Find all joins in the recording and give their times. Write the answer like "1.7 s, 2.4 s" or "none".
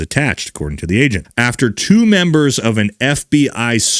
1.2 s